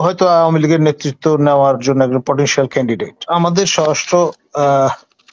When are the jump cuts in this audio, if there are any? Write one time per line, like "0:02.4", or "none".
0:03.3